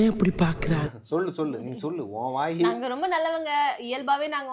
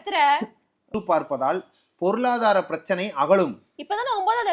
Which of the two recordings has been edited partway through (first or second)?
second